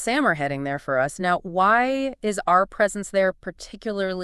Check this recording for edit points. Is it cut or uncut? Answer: uncut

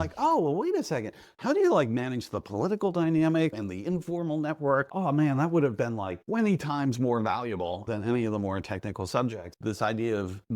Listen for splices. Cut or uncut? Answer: cut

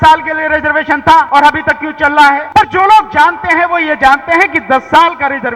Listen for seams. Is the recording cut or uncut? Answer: cut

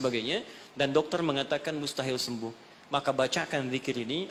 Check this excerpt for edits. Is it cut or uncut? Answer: uncut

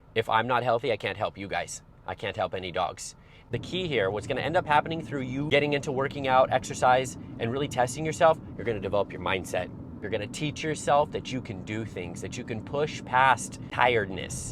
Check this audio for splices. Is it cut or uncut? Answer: cut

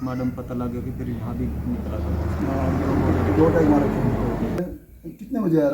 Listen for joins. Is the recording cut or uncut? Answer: cut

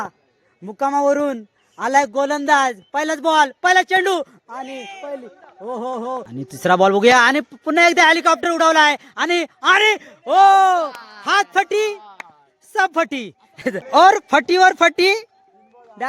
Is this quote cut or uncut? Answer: cut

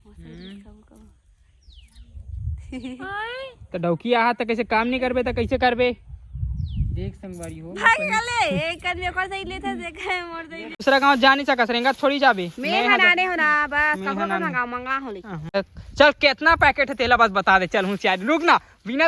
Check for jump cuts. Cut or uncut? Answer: cut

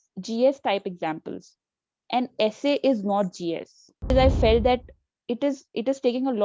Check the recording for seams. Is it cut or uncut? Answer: cut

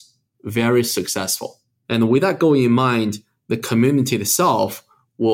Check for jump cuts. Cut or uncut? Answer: cut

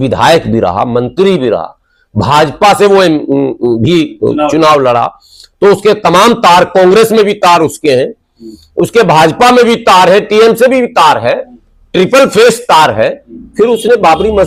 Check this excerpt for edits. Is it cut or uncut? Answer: uncut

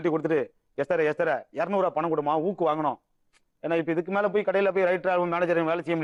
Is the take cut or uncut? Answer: uncut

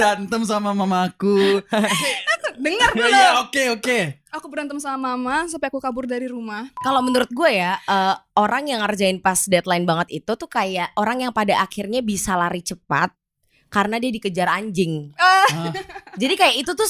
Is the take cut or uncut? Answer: cut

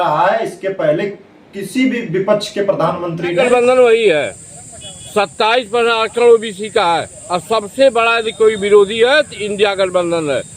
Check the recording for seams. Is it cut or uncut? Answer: cut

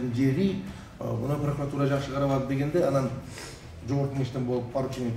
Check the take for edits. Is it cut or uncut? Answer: uncut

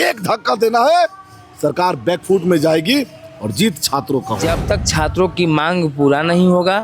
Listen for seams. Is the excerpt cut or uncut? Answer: cut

